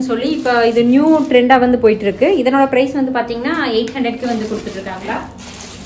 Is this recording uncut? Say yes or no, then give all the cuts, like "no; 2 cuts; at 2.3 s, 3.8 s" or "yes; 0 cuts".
no; 1 cut; at 5.0 s